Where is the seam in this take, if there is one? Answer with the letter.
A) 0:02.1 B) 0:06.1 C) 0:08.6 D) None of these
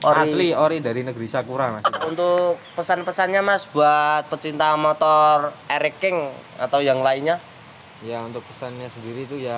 A